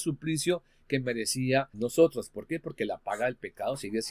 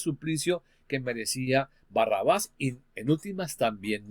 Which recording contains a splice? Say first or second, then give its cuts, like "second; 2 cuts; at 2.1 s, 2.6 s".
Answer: first; 1 cut; at 1.7 s